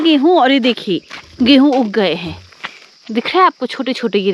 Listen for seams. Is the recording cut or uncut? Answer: uncut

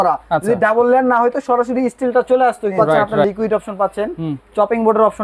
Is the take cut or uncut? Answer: cut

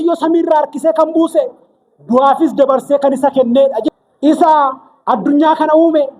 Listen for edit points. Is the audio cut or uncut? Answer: cut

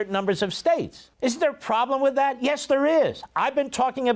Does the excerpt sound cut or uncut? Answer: cut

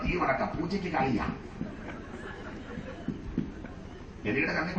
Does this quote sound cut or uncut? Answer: cut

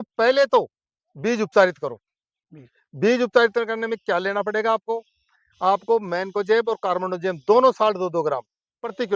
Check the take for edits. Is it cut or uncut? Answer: uncut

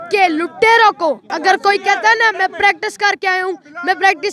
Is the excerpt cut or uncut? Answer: cut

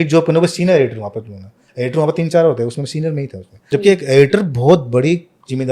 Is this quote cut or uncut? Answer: cut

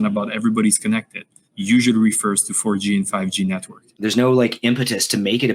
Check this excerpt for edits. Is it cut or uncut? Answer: cut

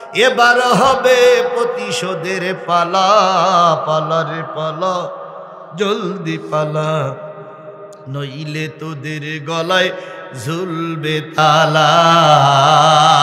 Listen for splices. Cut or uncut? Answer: uncut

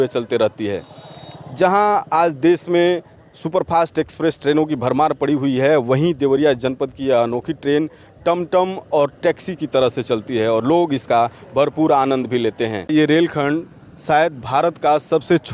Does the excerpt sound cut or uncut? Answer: cut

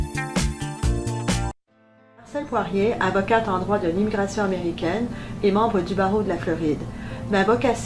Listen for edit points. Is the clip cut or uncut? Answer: cut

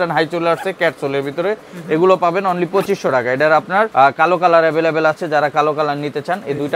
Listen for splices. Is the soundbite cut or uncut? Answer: uncut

